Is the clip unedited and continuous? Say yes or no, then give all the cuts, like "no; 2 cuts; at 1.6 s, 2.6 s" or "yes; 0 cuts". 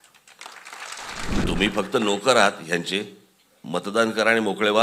no; 1 cut; at 1.4 s